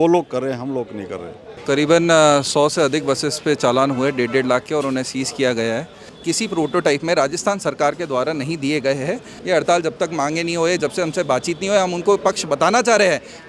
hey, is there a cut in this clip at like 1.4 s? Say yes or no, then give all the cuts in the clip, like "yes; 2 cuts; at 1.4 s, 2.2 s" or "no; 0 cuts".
yes; 3 cuts; at 1.4 s, 6.1 s, 9.3 s